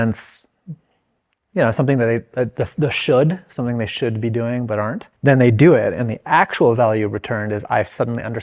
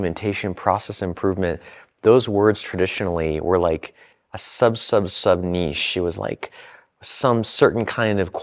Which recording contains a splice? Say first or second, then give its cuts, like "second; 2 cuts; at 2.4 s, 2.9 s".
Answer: first; 1 cut; at 5.1 s